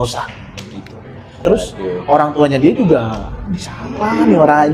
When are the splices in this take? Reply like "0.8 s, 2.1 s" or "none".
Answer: 1.4 s

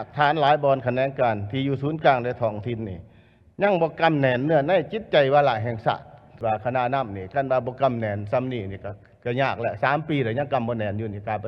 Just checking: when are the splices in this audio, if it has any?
6.4 s

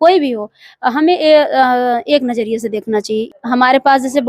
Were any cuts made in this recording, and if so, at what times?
3.3 s

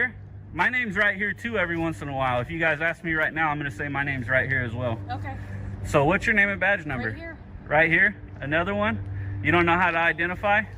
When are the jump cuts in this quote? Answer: none

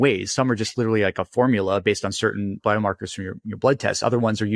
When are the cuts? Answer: 2.6 s

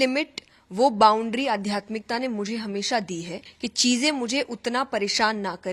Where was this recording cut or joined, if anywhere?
3.4 s

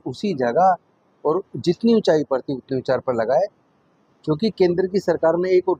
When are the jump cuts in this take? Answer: none

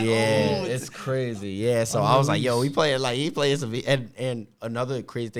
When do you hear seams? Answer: none

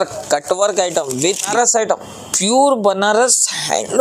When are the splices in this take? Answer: 1.5 s

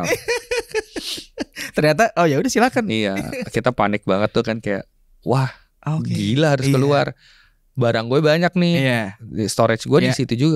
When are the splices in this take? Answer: none

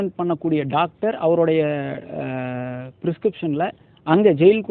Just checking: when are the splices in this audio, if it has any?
none

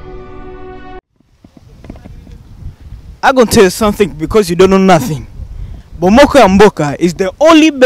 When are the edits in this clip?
0.9 s

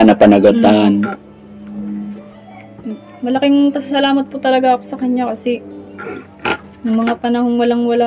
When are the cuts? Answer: none

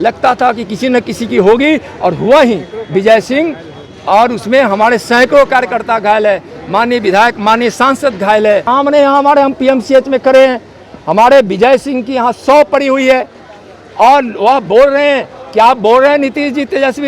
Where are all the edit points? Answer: 8.6 s

